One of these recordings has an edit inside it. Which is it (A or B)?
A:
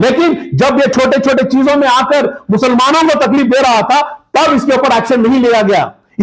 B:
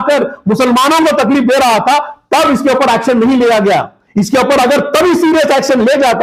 A